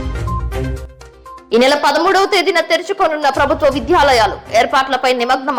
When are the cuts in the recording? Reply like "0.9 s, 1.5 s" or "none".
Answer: none